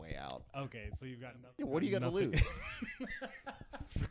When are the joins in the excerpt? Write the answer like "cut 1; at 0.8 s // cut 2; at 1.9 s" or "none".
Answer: cut 1; at 1.5 s